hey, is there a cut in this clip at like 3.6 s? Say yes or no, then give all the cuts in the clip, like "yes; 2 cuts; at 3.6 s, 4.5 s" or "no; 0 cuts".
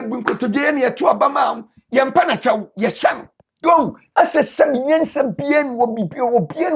yes; 1 cut; at 3.6 s